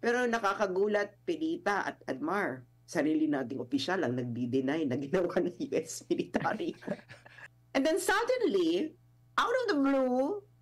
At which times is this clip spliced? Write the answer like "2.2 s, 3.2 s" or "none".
7.3 s